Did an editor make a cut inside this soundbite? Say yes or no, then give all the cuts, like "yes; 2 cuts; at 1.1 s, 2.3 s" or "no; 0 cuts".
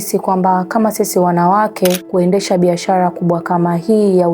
yes; 1 cut; at 2.0 s